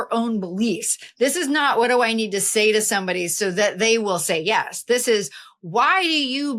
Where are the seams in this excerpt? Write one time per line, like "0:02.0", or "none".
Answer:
none